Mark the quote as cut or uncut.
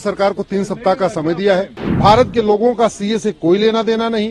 cut